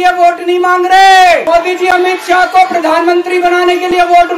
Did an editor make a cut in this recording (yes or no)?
yes